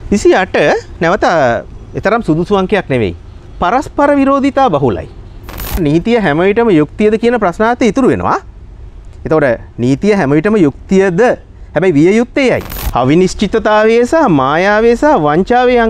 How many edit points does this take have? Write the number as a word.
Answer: two